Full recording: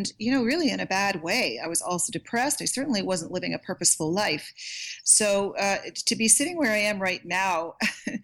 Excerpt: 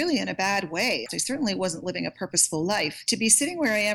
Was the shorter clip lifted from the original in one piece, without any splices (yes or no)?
no